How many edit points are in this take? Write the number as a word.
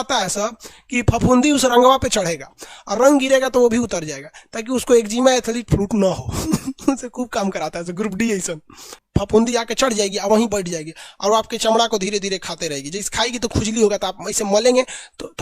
one